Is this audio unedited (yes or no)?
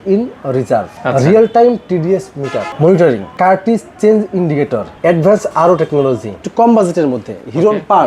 no